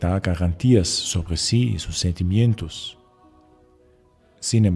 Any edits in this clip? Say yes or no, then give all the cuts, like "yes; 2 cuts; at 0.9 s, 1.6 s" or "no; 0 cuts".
yes; 1 cut; at 1.3 s